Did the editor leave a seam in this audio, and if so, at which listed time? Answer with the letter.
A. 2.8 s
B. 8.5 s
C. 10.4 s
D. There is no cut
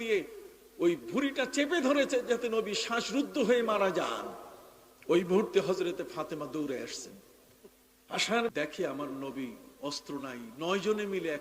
B